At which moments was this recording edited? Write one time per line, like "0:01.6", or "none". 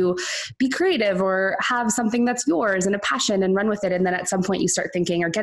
none